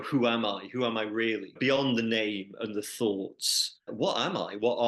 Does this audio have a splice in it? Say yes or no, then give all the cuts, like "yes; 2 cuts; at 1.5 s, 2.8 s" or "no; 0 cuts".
yes; 2 cuts; at 1.6 s, 3.9 s